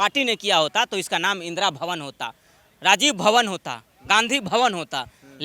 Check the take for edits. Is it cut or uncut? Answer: uncut